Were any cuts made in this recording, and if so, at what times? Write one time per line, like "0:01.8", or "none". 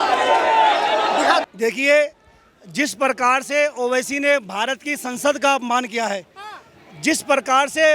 0:01.5